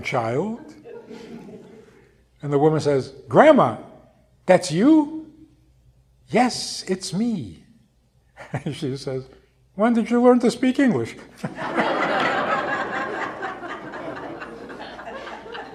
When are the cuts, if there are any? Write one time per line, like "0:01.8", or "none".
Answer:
none